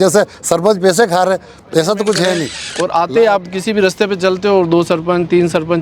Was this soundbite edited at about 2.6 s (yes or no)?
yes